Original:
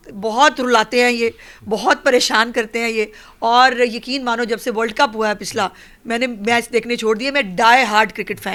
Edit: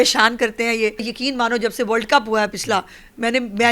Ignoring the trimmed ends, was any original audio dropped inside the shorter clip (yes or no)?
yes